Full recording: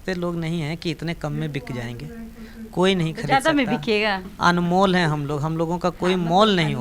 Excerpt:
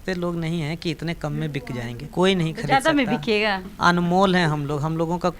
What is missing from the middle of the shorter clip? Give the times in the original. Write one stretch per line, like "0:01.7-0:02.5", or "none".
0:02.0-0:02.6